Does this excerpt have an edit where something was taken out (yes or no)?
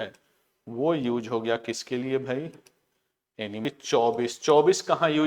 yes